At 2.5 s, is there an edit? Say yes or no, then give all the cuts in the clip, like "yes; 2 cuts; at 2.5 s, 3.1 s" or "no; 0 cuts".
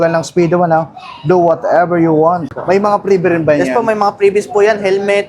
yes; 1 cut; at 2.5 s